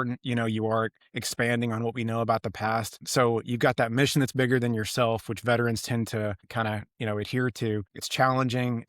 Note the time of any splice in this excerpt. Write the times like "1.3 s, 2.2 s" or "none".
3.0 s, 6.4 s, 8.0 s